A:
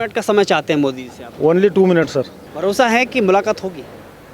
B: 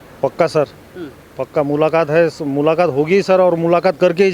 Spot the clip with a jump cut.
A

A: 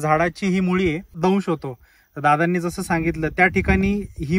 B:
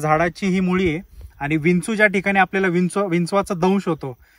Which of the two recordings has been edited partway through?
A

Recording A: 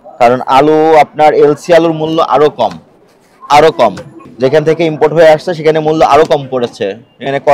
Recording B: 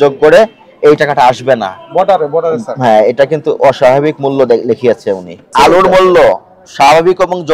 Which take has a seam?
B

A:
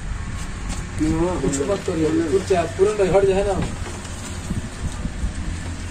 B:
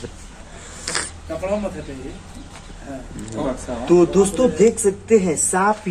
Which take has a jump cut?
B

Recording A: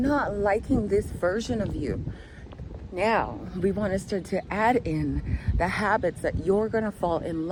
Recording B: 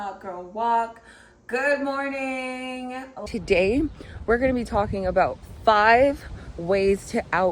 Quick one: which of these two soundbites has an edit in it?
B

